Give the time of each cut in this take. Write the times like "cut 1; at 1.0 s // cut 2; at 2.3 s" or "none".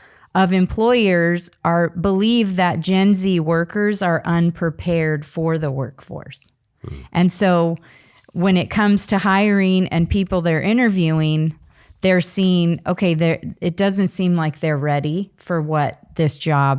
none